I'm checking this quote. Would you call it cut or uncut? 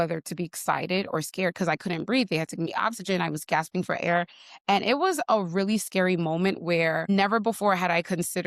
cut